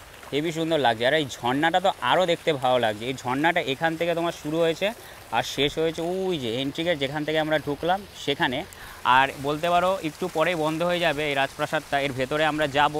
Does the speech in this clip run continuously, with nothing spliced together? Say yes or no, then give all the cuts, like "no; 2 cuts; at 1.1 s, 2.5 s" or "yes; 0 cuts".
yes; 0 cuts